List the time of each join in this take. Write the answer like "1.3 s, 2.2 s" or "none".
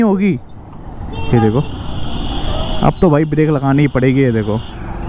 none

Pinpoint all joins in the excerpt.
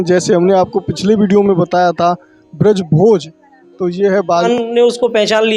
4.4 s

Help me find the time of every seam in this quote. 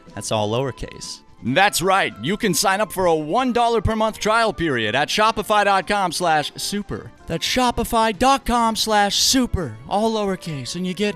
none

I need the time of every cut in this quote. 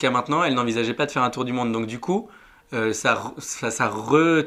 none

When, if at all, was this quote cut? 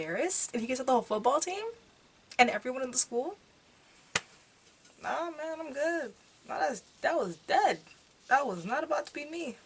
none

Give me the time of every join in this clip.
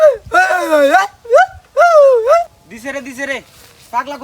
2.8 s

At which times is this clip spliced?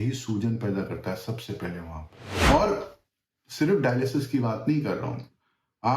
2.2 s

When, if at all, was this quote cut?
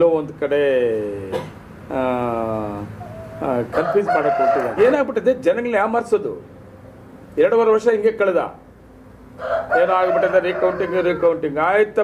4.7 s

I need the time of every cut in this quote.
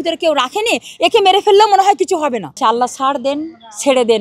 2.5 s

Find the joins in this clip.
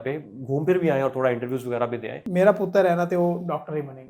2.2 s

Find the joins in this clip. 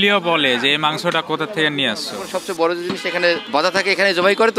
2.3 s, 3.4 s

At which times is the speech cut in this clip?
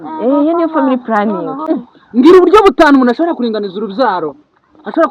1.6 s

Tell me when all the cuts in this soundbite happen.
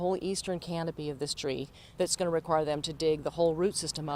1.8 s

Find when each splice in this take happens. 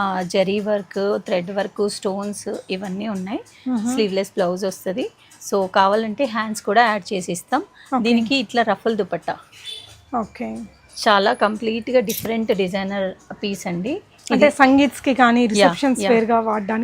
none

